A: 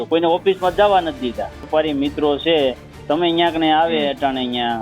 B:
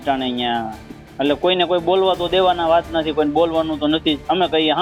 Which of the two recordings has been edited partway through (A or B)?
A